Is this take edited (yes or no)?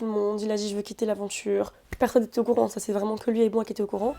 yes